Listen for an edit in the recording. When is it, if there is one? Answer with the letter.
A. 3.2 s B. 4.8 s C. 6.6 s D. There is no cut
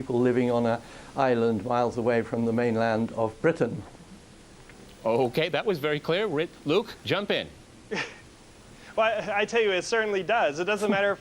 C